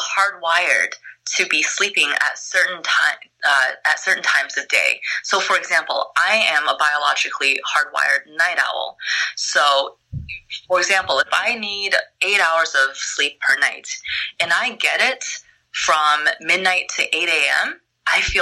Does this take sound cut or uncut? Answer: uncut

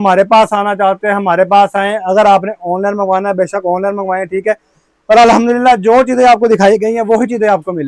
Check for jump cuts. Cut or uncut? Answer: uncut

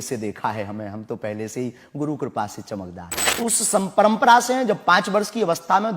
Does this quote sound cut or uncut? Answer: cut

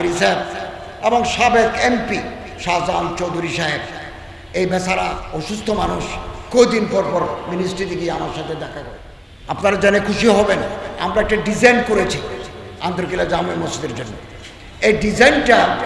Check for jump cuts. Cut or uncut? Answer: cut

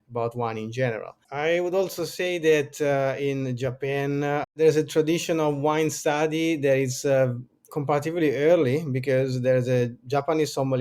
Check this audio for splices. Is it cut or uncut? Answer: cut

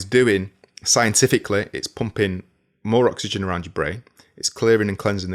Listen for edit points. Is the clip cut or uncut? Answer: uncut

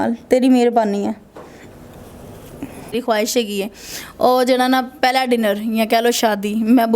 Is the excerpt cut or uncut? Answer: cut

